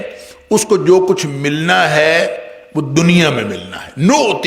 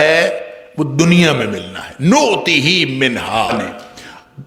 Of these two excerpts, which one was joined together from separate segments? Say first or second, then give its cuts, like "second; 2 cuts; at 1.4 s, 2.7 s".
second; 1 cut; at 3.5 s